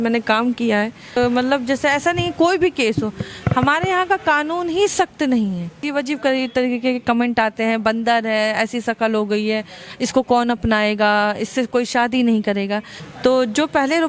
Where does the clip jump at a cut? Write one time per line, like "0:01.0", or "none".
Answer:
0:01.2
0:05.8
0:12.9

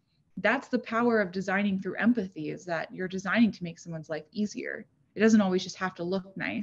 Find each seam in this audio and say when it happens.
none

